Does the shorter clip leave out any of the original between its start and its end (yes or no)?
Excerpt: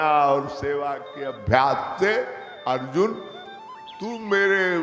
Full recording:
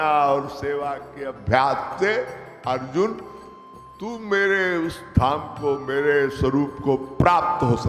no